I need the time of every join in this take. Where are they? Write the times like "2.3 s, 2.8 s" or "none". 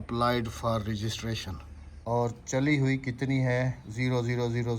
1.9 s

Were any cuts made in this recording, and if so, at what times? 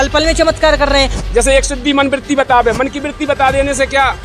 1.2 s

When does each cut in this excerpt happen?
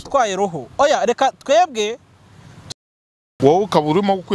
2.7 s

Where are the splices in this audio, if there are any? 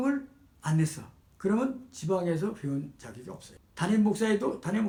none

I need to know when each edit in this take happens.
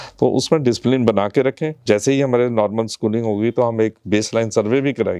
1.8 s

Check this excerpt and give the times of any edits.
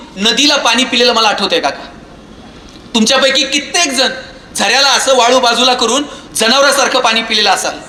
none

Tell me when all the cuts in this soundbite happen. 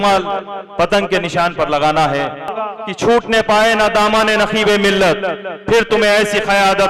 2.6 s

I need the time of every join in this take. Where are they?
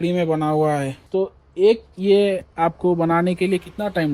1.0 s

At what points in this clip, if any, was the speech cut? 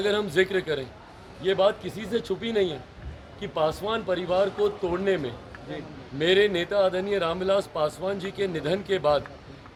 none

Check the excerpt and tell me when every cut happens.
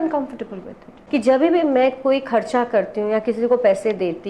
0.9 s

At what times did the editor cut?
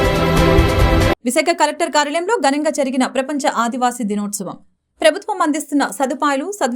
1.0 s

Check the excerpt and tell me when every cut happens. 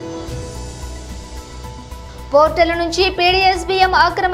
1.7 s

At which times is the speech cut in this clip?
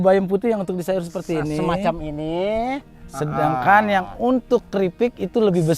none

